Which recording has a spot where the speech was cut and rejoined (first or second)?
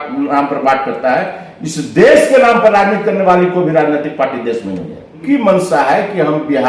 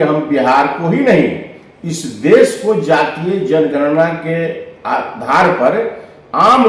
first